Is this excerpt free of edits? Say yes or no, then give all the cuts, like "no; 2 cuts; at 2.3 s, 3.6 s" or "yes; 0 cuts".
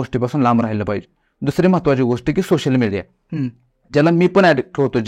yes; 0 cuts